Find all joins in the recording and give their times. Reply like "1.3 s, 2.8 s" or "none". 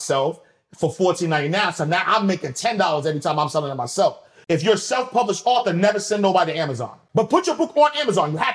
4.3 s, 7.0 s